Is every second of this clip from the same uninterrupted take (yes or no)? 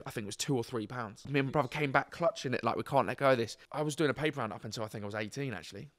no